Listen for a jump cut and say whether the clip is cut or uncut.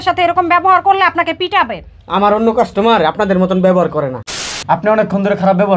cut